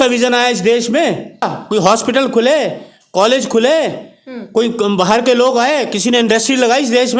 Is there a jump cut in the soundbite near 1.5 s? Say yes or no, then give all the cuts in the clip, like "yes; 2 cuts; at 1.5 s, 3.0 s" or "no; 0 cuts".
yes; 1 cut; at 1.5 s